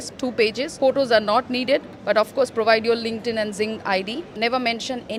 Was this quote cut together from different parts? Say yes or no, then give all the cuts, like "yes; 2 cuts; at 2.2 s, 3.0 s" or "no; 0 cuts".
no; 0 cuts